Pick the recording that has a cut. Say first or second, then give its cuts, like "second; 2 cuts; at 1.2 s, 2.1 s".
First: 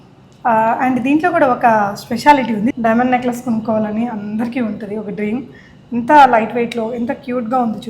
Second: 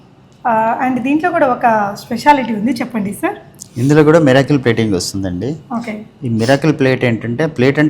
first; 1 cut; at 2.7 s